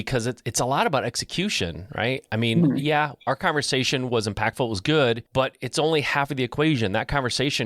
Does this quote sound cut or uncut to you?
cut